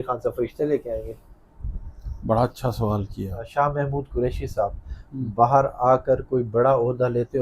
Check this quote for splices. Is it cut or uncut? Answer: cut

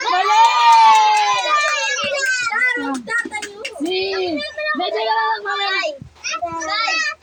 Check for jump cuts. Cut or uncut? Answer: uncut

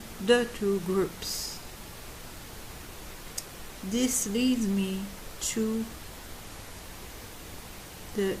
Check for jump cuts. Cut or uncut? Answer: uncut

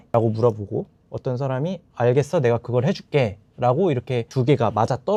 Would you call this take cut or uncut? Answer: uncut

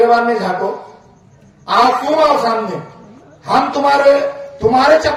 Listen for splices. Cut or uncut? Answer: uncut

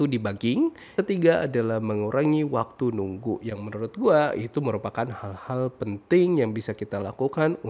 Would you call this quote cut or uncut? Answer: cut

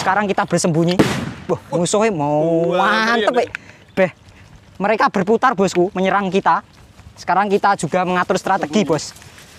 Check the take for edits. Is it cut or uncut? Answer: uncut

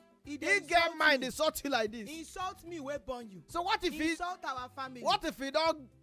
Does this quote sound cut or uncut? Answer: uncut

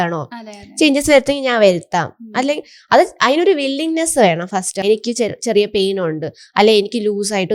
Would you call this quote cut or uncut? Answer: cut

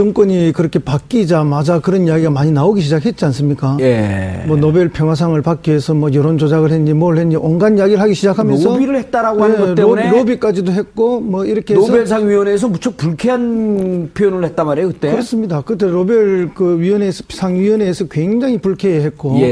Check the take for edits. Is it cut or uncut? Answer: uncut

